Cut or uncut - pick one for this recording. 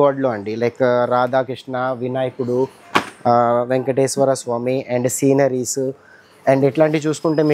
uncut